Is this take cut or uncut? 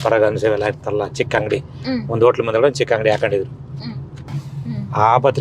cut